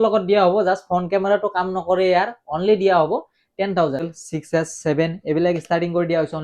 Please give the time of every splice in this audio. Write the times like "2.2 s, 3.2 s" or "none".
4.1 s